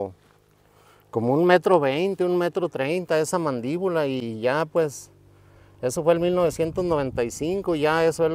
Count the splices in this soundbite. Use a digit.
0